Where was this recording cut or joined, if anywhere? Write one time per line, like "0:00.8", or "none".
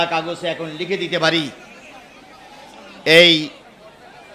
none